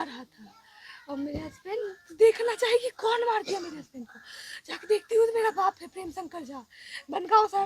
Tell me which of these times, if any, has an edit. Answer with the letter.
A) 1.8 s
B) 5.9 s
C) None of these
A